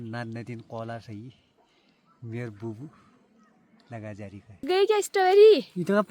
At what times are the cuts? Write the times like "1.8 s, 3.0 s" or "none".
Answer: 4.6 s

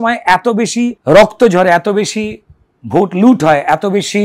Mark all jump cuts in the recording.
1.0 s

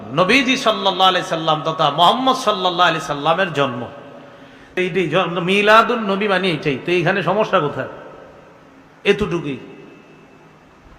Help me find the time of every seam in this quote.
4.8 s

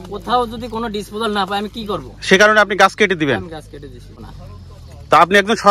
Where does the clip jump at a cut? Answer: 4.2 s

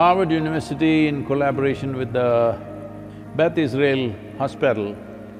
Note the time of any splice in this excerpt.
none

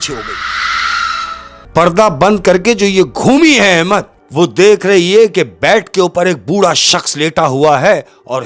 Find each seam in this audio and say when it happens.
1.5 s, 4.2 s

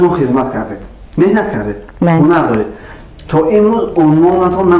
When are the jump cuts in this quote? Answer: none

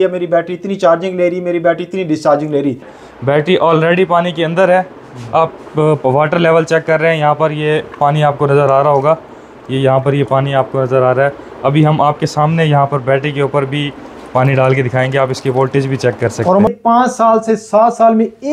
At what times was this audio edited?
2.9 s, 16.7 s

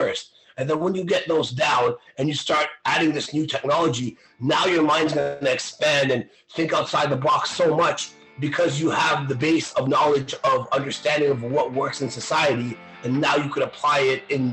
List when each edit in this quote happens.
none

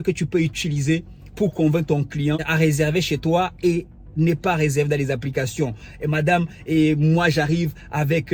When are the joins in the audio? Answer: 2.5 s

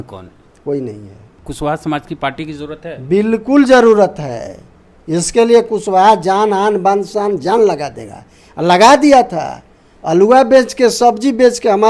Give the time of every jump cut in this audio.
1.4 s

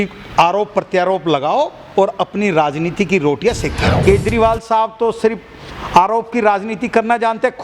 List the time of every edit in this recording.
4.0 s

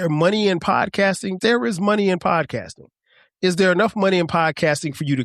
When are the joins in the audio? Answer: 1.4 s

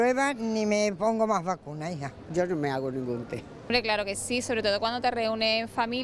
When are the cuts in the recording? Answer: 3.8 s

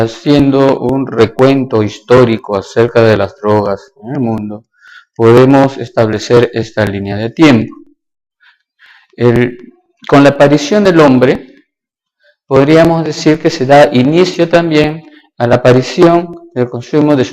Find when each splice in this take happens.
9.7 s

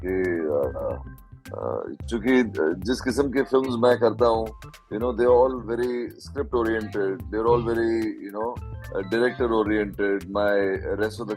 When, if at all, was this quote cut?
none

